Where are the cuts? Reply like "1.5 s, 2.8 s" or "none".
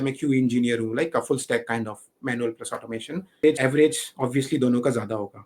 3.4 s